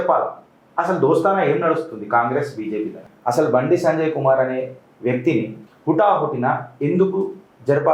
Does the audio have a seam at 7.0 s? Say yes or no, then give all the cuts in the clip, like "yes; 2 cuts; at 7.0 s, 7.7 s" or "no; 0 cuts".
no; 2 cuts; at 3.1 s, 5.7 s